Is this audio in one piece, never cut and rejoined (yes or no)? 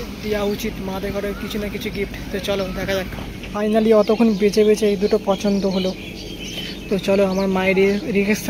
no